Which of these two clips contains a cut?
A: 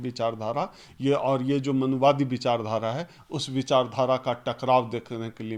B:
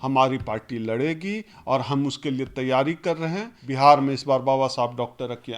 B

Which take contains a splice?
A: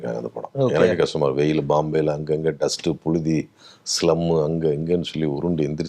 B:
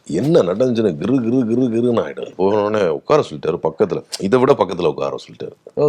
B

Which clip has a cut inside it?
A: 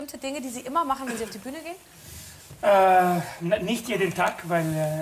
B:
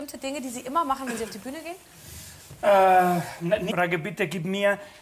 A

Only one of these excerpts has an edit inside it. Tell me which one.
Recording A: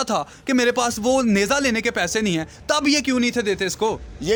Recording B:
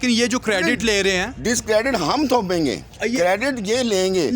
B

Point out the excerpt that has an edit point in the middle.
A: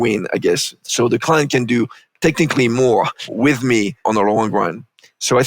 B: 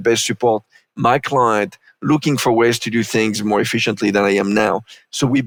A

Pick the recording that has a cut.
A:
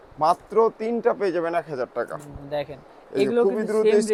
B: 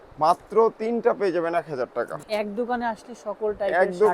B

